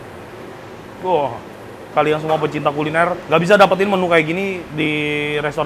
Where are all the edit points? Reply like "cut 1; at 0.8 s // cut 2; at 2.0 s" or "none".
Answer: cut 1; at 1.9 s // cut 2; at 3.2 s // cut 3; at 4.7 s